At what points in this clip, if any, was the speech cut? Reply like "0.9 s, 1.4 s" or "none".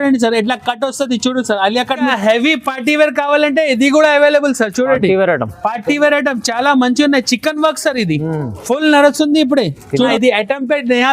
2.1 s, 9.9 s